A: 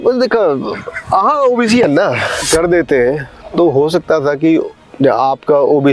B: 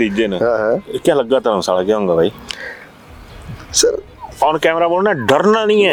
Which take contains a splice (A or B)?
A